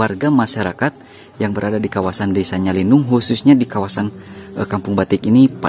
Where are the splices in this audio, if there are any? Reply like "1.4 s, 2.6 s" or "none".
none